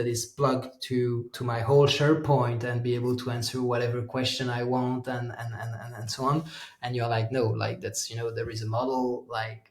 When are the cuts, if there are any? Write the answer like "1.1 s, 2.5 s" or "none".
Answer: 1.3 s